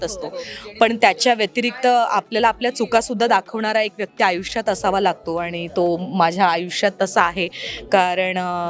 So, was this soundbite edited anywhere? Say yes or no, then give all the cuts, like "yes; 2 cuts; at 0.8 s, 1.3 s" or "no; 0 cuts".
no; 0 cuts